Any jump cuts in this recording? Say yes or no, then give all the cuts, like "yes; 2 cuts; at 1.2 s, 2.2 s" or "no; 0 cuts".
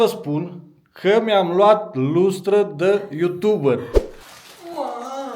yes; 1 cut; at 4.0 s